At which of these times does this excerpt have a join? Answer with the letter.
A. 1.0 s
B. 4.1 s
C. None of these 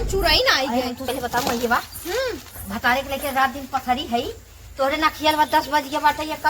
A